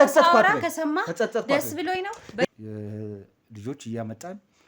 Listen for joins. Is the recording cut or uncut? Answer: cut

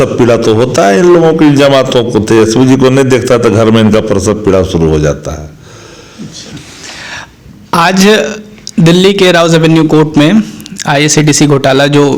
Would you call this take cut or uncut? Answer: uncut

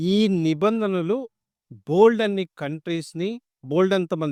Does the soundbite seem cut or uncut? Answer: uncut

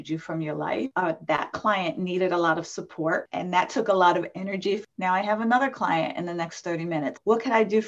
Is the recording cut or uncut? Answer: cut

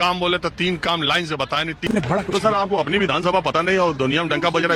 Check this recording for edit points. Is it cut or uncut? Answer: cut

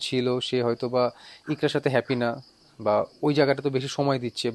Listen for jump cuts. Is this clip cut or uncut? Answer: uncut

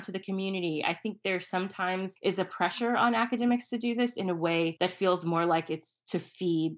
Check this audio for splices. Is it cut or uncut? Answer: cut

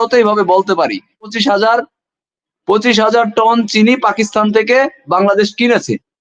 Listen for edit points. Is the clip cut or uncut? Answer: cut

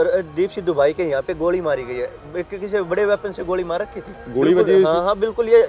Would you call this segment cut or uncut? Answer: uncut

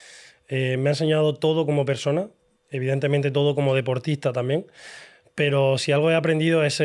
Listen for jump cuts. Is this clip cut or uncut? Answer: uncut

